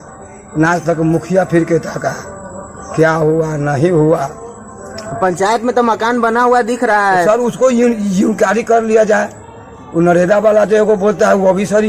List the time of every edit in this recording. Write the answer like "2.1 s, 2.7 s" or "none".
none